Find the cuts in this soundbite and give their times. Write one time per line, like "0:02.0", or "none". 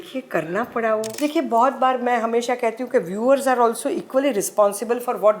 0:01.1